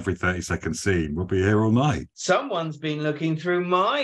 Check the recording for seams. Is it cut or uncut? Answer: cut